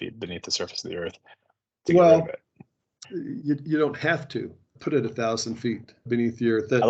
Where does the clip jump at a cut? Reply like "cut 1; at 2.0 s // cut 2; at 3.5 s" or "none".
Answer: none